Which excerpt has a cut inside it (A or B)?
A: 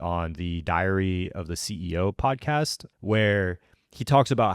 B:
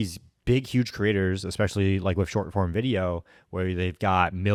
A